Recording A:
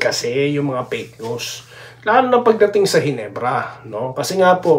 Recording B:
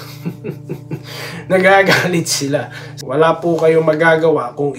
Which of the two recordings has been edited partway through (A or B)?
B